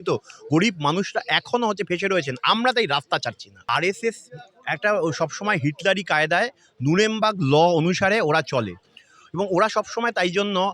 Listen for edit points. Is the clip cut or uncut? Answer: cut